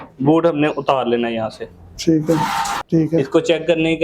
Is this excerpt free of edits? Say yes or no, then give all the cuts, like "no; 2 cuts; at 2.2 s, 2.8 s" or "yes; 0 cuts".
no; 1 cut; at 2.8 s